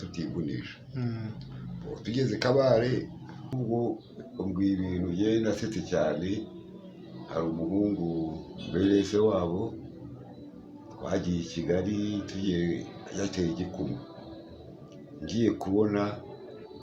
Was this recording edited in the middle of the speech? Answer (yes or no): yes